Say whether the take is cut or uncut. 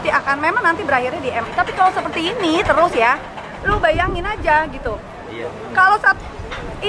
cut